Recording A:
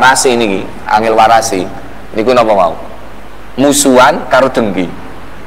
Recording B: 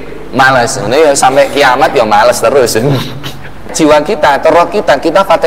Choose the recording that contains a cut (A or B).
B